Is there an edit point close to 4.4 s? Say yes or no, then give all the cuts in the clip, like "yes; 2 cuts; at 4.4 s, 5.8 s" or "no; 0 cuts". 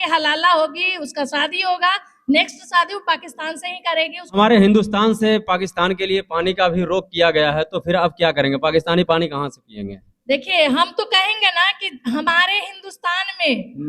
yes; 1 cut; at 4.4 s